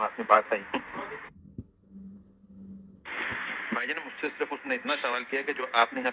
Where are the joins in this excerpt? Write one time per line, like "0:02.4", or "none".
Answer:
none